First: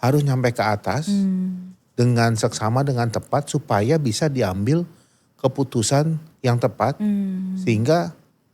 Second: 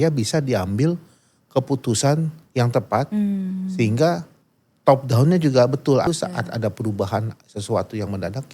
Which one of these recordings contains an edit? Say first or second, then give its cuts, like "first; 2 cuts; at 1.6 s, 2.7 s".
second; 1 cut; at 6.1 s